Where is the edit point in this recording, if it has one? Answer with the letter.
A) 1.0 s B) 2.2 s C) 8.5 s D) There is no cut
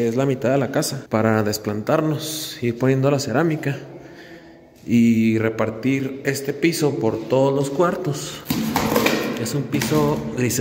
A